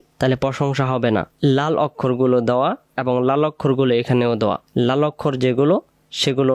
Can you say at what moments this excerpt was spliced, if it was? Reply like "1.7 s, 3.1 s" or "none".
1.3 s, 2.9 s, 4.6 s